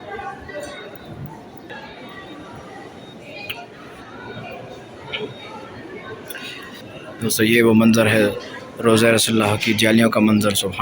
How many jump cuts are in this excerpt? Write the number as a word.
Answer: two